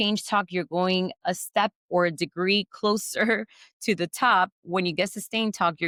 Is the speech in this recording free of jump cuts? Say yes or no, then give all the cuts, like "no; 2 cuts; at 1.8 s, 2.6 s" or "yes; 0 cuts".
yes; 0 cuts